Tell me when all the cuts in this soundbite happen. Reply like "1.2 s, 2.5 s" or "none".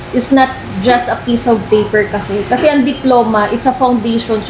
none